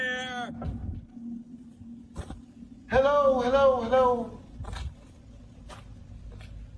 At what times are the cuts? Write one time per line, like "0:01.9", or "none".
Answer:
none

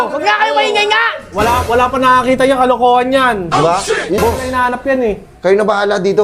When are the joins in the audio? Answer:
0:04.2

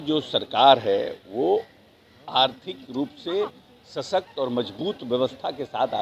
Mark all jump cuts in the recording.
none

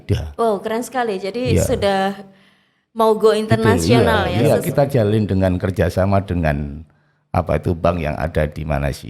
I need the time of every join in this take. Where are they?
0:04.3

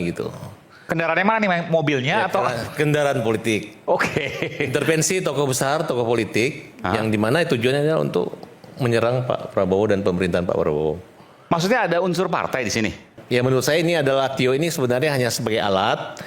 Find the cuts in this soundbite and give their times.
0:13.2

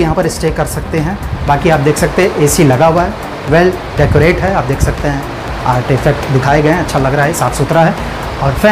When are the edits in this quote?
none

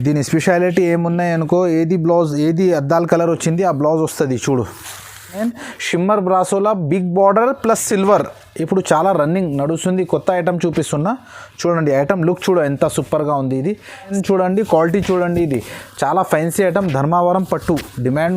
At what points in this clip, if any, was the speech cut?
0:05.4
0:14.1

